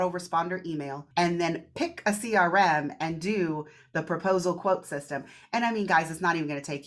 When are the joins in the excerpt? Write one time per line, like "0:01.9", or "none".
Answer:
0:01.0